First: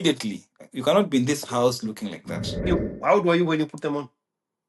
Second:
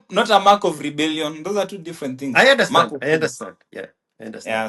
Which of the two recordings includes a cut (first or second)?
first